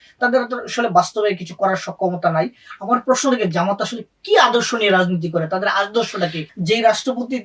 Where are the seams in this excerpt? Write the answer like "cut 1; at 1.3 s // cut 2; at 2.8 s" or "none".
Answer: cut 1; at 2.7 s // cut 2; at 6.4 s